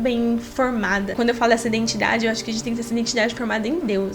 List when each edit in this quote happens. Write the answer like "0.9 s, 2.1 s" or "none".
1.1 s